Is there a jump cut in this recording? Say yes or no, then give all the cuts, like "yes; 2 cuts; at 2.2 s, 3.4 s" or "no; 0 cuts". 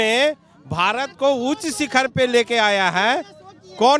no; 0 cuts